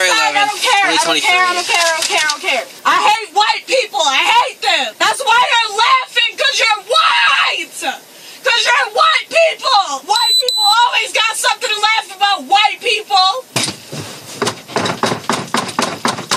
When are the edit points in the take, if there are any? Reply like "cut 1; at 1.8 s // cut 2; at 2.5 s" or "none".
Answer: none